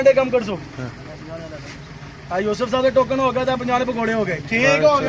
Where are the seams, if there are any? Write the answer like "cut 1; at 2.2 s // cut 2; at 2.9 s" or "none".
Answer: cut 1; at 2.1 s